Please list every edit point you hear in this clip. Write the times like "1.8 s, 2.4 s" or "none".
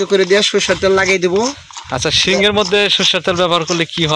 none